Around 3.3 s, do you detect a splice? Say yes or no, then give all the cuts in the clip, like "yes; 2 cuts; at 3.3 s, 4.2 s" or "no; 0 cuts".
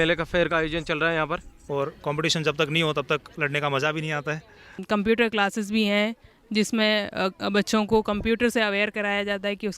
no; 2 cuts; at 1.5 s, 4.8 s